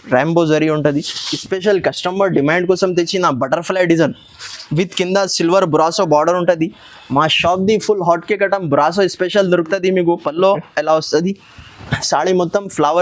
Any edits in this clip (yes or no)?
yes